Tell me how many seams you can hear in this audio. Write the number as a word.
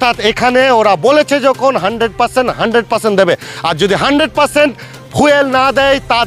zero